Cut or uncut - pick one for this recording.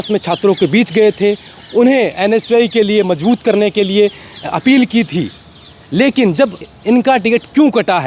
cut